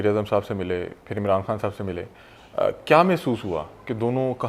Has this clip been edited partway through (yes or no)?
no